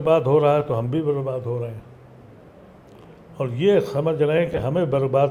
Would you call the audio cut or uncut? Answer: uncut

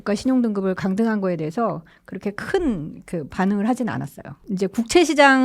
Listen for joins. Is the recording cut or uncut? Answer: cut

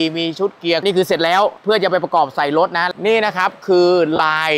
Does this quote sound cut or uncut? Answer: cut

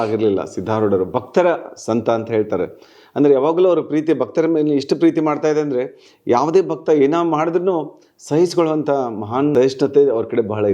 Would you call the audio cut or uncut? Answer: cut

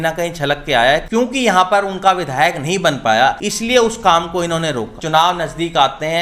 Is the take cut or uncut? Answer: cut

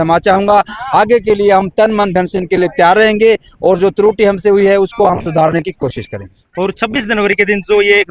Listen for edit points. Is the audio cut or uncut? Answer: uncut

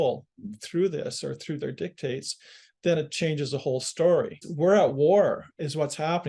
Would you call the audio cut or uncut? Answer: cut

